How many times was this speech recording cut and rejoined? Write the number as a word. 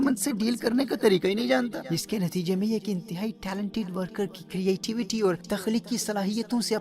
two